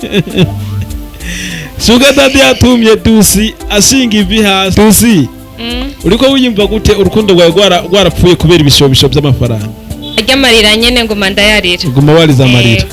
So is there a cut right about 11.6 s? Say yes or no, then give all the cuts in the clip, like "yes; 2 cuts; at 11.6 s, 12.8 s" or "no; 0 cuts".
no; 2 cuts; at 4.7 s, 10.2 s